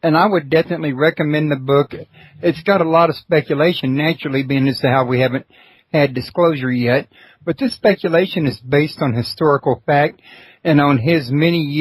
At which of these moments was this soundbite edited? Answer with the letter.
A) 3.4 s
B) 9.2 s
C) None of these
A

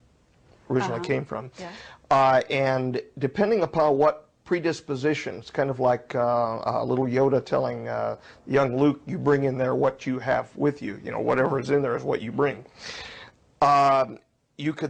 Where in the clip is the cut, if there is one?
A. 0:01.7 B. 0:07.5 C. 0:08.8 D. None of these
D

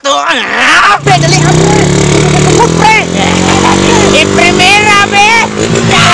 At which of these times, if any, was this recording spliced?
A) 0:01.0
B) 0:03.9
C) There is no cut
A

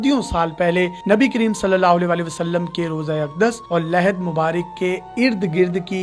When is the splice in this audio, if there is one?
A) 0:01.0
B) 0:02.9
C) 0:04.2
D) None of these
D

